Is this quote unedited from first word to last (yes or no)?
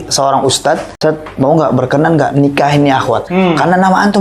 no